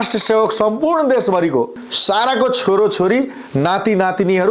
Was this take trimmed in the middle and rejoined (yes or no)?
yes